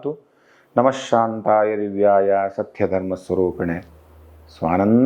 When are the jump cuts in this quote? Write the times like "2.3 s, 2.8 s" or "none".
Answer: none